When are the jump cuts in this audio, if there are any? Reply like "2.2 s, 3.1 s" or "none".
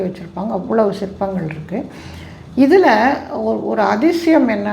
none

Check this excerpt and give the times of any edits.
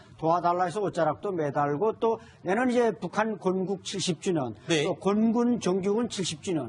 none

